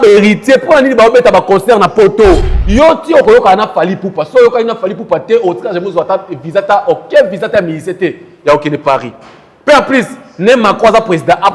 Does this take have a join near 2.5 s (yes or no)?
yes